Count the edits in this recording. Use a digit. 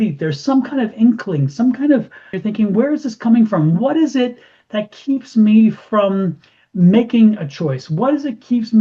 1